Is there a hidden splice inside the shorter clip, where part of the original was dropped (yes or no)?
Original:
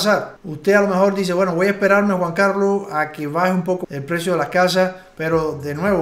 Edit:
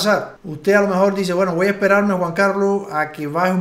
no